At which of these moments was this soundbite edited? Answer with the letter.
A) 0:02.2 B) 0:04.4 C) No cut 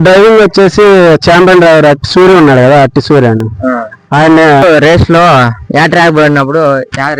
B